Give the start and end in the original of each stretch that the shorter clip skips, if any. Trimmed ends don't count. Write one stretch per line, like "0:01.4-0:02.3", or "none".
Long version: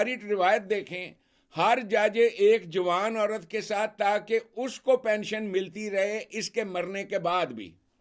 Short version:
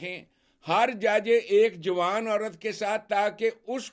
none